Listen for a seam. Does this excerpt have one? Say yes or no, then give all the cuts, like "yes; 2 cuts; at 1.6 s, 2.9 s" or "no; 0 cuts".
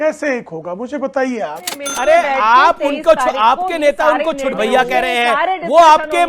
yes; 1 cut; at 1.8 s